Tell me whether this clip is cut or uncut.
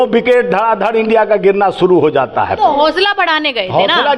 uncut